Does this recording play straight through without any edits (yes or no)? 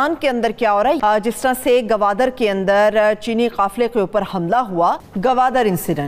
yes